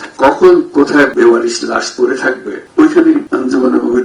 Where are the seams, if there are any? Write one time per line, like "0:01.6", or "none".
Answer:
0:01.1
0:02.5
0:03.3

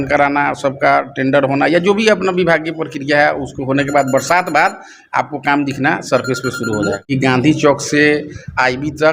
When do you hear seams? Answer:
0:07.1

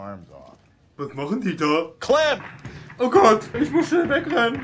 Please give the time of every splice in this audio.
0:03.5

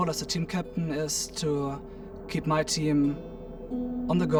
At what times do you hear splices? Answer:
none

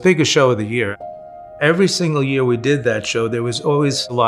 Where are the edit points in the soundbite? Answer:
0:01.0

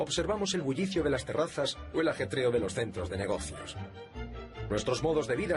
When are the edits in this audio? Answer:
0:01.8

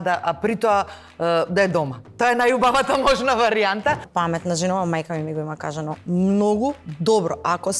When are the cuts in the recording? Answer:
0:04.5

